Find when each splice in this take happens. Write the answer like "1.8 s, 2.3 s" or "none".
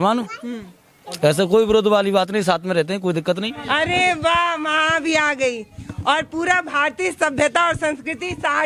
3.5 s

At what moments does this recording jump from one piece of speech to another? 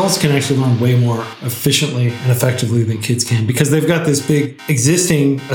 none

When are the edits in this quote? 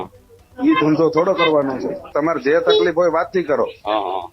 2.1 s

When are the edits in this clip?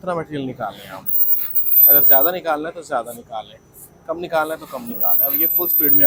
none

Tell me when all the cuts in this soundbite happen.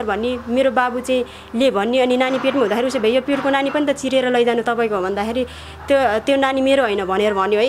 none

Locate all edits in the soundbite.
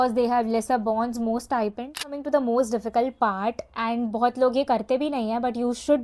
2.2 s

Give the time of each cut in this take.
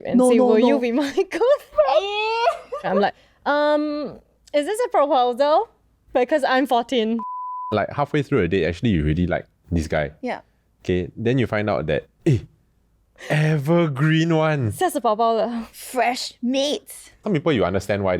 2.9 s, 7.5 s, 17.2 s

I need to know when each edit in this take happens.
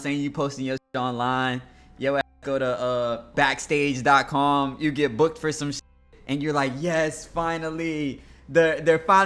3.3 s

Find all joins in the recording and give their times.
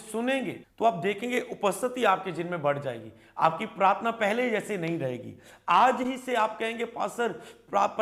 none

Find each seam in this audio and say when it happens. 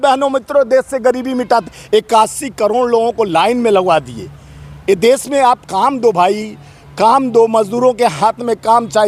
none

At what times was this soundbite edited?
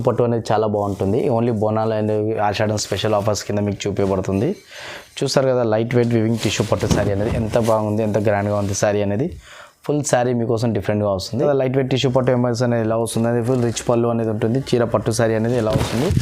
11.5 s

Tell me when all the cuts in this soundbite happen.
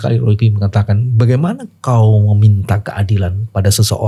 none

